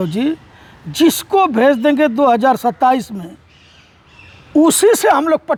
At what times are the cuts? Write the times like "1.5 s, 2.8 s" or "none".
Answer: none